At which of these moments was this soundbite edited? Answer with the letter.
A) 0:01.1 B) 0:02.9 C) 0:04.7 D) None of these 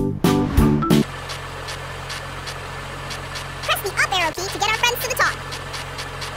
A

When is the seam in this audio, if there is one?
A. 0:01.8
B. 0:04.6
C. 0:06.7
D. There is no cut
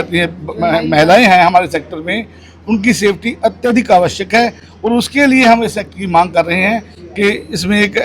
D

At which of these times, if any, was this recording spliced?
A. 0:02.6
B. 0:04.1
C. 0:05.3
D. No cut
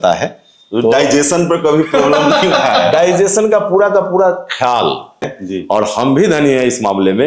C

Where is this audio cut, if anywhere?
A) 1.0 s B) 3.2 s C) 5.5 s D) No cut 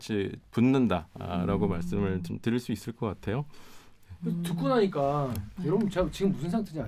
D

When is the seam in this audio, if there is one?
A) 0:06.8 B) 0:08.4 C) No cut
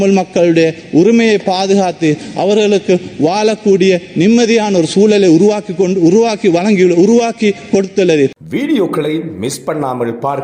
B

